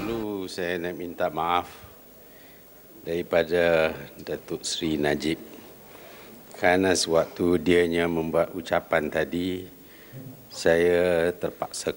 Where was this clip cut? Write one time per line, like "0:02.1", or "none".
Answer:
none

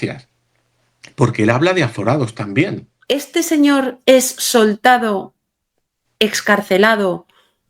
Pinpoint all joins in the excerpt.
0:02.9

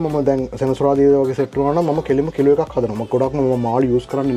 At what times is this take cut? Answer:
none

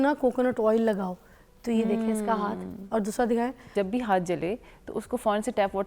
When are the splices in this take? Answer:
0:03.7

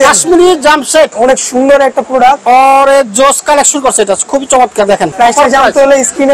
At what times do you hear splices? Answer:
0:01.1
0:05.1

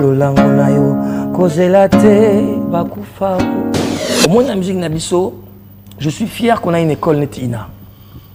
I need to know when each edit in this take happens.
0:04.0

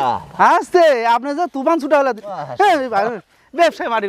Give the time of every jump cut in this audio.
none

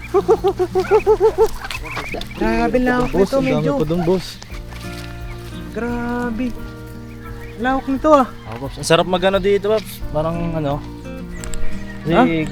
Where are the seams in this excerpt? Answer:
0:02.2

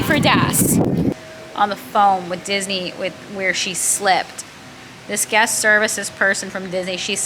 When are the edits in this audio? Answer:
0:01.1

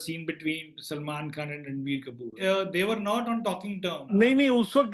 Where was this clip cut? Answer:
0:02.4
0:04.1

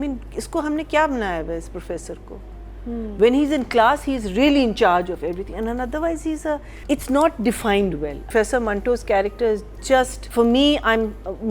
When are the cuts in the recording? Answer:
0:06.7
0:08.2
0:10.2

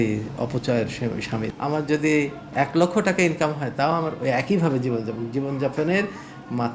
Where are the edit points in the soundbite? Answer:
0:01.5

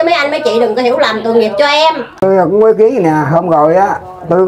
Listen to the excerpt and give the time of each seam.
0:02.2

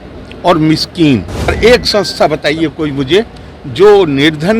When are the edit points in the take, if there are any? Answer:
0:01.5

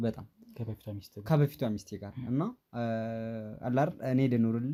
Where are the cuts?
none

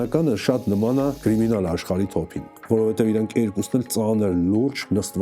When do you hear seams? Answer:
0:01.2

